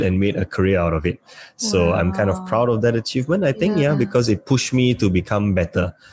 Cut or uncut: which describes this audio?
uncut